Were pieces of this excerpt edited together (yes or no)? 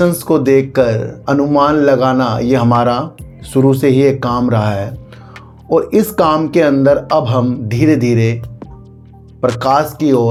no